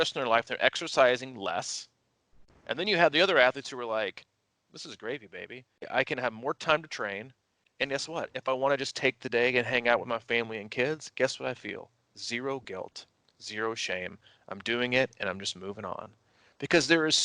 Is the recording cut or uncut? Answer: cut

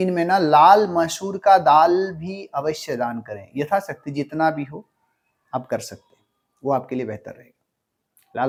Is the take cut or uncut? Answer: uncut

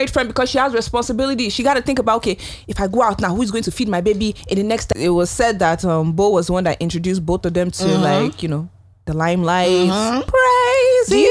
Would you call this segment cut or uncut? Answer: cut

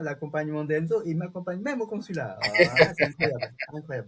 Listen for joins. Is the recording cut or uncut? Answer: uncut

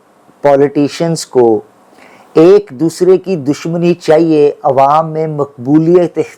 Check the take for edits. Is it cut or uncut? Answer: uncut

